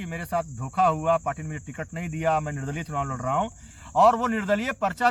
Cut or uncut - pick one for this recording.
uncut